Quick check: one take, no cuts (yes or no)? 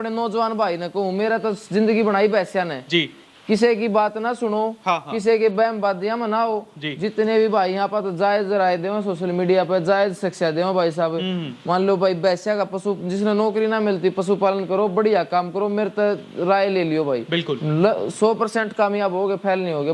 yes